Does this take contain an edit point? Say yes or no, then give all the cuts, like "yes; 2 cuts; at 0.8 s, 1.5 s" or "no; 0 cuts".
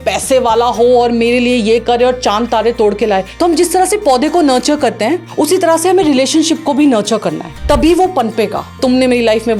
yes; 3 cuts; at 3.3 s, 5.2 s, 8.8 s